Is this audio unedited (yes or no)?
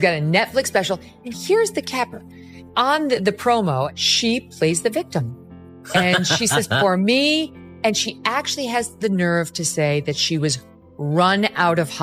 no